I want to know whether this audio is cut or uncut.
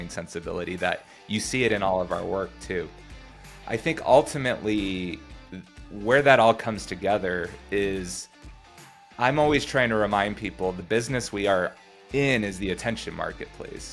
uncut